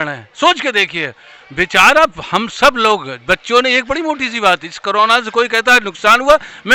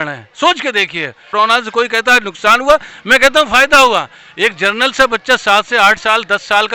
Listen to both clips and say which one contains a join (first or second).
second